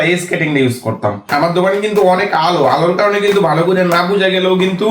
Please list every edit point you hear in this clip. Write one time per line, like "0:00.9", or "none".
0:01.2

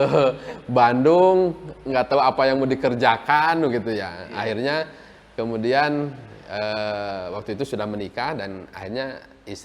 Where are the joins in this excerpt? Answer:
none

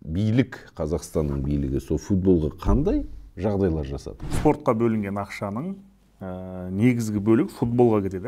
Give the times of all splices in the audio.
0:04.2

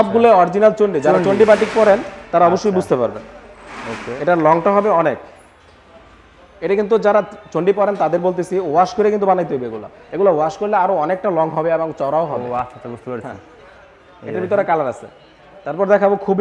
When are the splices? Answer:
none

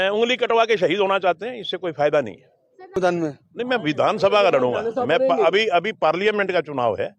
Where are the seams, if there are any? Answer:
0:03.0

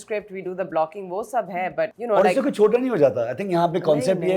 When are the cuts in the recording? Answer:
0:02.0

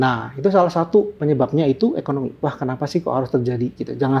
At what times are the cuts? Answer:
0:02.3

